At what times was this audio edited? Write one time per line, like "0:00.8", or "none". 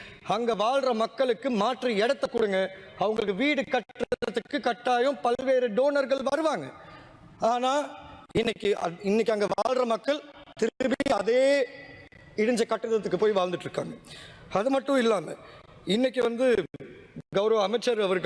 none